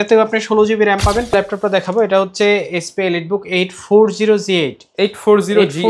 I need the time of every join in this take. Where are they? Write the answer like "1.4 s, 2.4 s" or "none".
1.3 s